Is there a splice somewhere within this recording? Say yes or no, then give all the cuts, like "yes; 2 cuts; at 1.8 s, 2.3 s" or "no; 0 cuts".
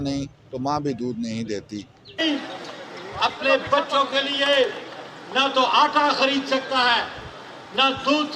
yes; 1 cut; at 2.2 s